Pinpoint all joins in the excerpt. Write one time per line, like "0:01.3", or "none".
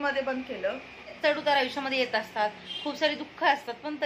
0:01.2

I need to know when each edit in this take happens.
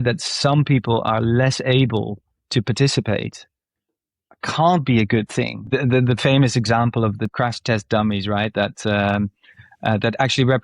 0:05.7
0:07.3

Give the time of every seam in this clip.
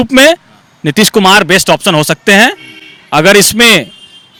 none

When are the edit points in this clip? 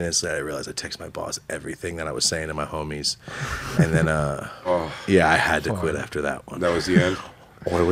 none

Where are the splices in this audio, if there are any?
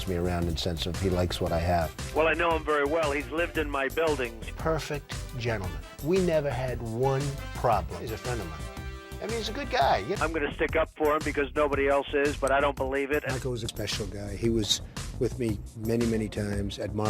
0:10.2
0:13.7

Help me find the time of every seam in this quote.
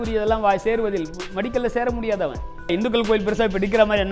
0:02.7

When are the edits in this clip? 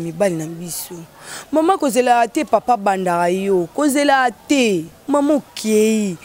0:04.9

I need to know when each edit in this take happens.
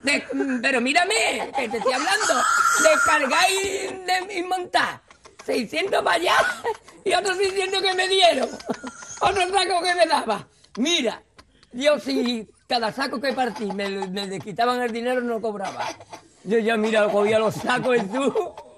0:12.3

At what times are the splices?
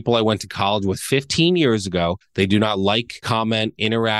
0:02.2
0:03.1

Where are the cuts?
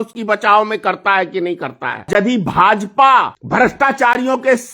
0:02.1
0:03.4

